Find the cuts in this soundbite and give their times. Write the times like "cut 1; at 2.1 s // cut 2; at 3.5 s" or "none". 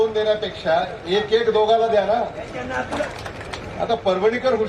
cut 1; at 3.1 s